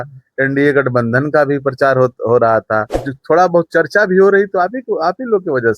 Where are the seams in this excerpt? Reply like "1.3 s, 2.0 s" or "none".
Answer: 3.1 s